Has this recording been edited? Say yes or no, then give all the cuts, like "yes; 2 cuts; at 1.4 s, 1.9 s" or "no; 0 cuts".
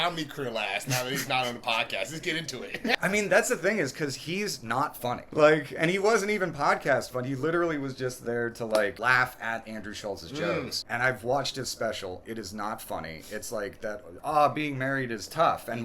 yes; 5 cuts; at 2.9 s, 5.2 s, 9.0 s, 10.8 s, 14.2 s